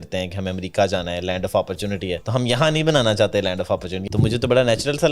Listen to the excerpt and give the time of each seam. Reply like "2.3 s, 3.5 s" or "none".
2.2 s, 3.9 s